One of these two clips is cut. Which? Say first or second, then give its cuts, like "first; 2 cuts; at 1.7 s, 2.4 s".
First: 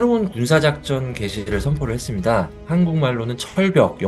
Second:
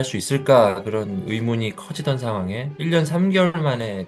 first; 1 cut; at 2.6 s